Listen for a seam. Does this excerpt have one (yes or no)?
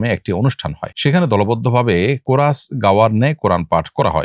no